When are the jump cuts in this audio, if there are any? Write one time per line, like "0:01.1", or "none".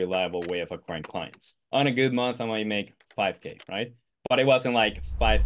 0:01.5